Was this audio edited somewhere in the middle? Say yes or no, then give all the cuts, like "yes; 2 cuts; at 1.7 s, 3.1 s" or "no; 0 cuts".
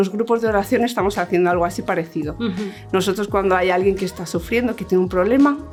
no; 0 cuts